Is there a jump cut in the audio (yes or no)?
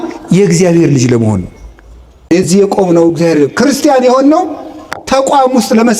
yes